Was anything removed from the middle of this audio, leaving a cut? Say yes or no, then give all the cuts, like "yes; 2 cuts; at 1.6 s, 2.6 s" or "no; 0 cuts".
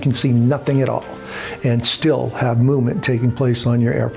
no; 0 cuts